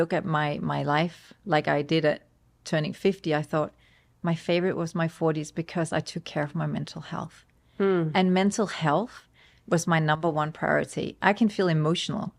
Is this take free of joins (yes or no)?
yes